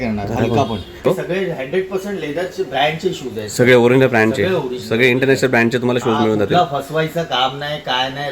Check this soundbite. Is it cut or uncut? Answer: cut